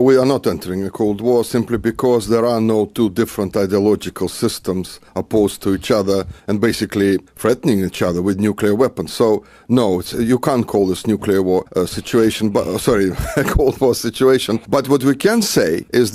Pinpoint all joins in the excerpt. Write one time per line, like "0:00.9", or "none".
0:05.6